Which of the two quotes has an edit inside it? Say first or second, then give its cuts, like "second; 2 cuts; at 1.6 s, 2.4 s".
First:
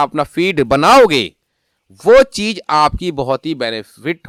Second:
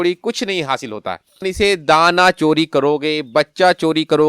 second; 1 cut; at 1.5 s